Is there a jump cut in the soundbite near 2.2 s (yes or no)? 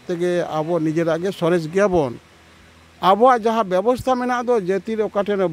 no